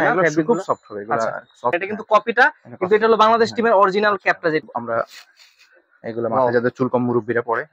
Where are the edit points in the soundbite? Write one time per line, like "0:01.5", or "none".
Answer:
0:01.8
0:04.6